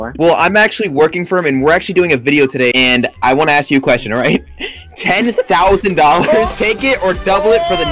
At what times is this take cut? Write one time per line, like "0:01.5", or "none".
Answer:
0:02.7